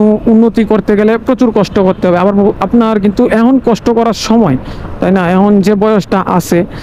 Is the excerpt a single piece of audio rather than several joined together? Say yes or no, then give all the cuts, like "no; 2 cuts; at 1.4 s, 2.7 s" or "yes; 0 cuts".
yes; 0 cuts